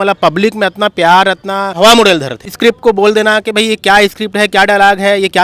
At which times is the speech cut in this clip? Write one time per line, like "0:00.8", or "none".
0:01.7
0:02.4